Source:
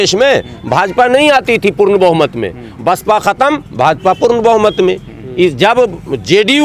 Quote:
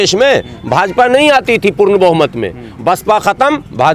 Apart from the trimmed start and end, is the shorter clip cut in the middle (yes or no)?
no